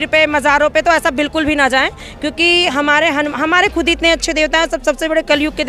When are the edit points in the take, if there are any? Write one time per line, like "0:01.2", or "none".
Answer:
none